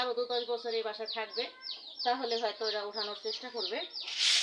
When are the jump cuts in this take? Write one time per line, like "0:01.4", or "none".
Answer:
none